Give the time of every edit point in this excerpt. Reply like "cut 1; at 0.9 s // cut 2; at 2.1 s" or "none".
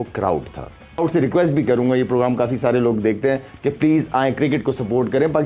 cut 1; at 1.0 s